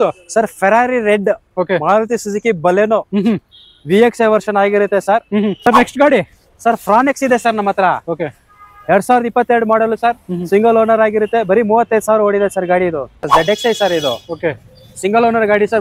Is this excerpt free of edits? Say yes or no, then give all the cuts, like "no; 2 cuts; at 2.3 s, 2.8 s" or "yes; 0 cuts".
no; 2 cuts; at 5.6 s, 13.1 s